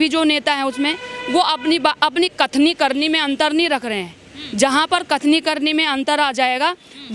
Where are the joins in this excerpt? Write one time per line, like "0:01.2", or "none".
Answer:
none